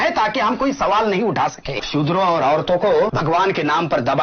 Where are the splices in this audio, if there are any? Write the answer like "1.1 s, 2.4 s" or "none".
1.8 s, 3.1 s